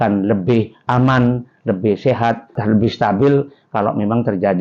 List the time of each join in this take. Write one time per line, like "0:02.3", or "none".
0:02.6